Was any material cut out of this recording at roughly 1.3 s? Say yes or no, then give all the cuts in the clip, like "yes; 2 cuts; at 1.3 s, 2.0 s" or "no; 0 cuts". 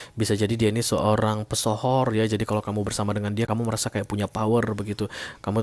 no; 1 cut; at 3.5 s